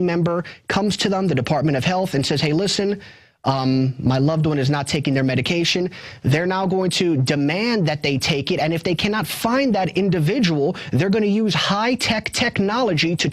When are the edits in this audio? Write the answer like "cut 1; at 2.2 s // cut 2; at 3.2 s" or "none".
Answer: cut 1; at 10.7 s